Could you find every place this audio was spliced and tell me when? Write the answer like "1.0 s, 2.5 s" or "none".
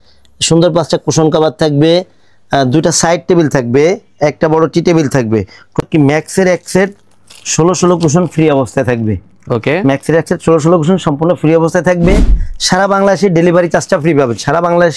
5.8 s